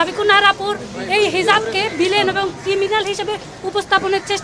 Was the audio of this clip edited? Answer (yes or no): no